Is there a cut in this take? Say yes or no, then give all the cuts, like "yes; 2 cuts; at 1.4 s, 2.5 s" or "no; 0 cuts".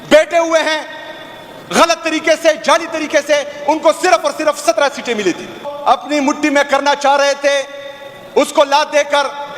yes; 1 cut; at 5.7 s